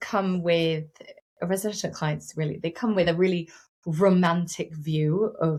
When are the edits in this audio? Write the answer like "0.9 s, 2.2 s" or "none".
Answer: none